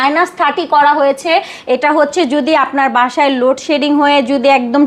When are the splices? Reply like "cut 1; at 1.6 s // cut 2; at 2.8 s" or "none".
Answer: none